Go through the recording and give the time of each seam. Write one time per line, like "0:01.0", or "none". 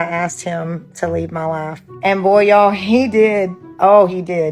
0:01.8
0:03.6

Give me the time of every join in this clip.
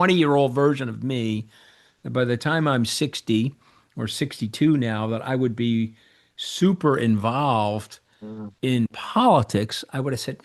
none

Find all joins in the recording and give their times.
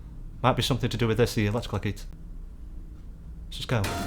0:02.1

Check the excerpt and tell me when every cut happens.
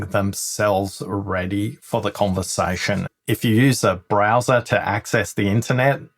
0:03.1

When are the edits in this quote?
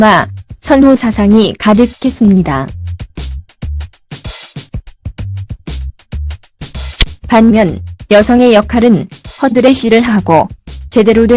0:04.9

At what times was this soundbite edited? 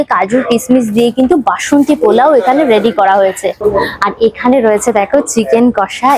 none

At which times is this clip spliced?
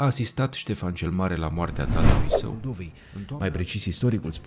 0:03.0

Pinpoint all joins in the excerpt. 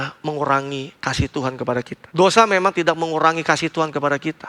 0:02.0

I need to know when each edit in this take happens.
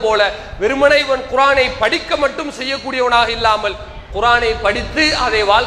none

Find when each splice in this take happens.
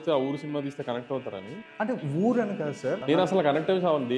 0:03.0

